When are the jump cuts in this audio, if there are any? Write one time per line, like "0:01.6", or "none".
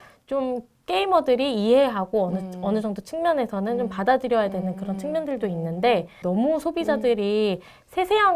0:06.2